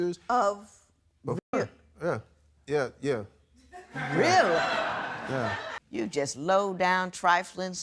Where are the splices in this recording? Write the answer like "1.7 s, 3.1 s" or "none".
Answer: 5.8 s